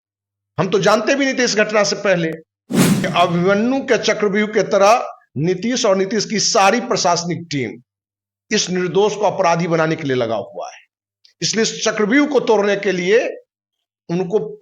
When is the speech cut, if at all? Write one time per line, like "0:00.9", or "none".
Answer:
0:03.1